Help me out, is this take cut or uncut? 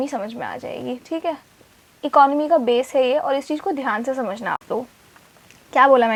uncut